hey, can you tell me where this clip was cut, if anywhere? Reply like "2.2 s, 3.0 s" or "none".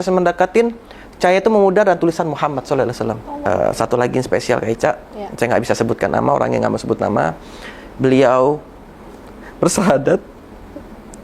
3.5 s